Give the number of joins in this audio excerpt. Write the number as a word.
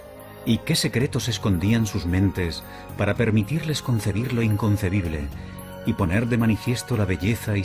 one